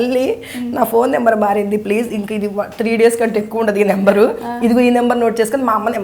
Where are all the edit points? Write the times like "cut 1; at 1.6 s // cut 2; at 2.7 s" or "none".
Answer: none